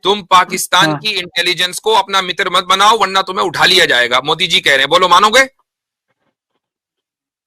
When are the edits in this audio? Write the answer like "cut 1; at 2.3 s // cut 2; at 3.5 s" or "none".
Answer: none